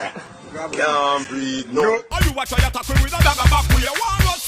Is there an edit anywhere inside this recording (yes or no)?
yes